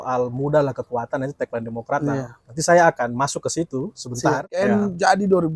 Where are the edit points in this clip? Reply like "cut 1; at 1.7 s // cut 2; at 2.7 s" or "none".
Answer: cut 1; at 4.5 s